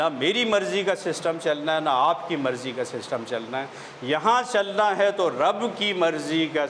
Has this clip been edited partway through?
no; 0 cuts

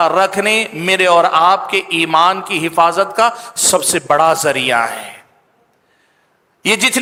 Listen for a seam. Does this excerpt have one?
no; 0 cuts

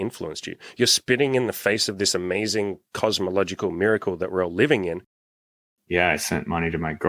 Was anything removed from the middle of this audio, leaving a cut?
yes; 1 cut; at 5.7 s

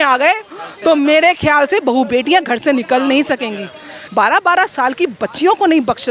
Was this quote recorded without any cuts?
no; 1 cut; at 4.0 s

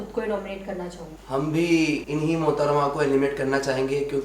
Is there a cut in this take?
yes; 2 cuts; at 1.1 s, 2.0 s

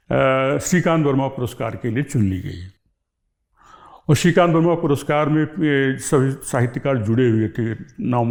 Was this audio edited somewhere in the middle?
no; 0 cuts

